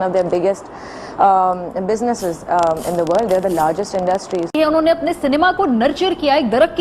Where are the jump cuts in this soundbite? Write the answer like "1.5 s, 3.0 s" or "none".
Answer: 4.5 s